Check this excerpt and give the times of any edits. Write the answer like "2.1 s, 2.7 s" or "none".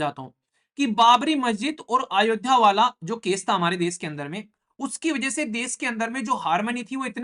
none